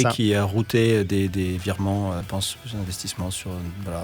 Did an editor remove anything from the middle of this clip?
yes; 1 cut; at 2.2 s

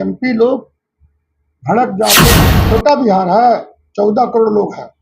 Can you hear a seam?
yes; 1 cut; at 2.3 s

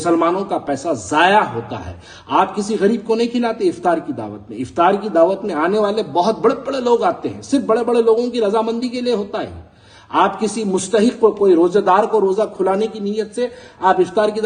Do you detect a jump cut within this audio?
no; 0 cuts

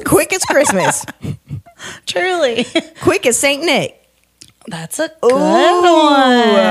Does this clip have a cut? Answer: no; 0 cuts

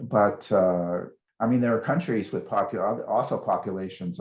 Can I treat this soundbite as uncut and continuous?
no; 1 cut; at 1.2 s

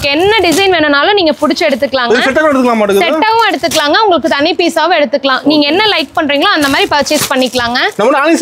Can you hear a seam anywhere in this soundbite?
no; 0 cuts

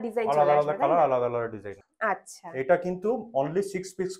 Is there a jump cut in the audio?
yes; 1 cut; at 1.8 s

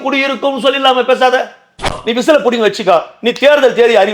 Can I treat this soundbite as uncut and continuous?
no; 1 cut; at 2.0 s

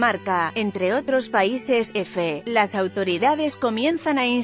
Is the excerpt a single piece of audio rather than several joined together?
no; 1 cut; at 2.3 s

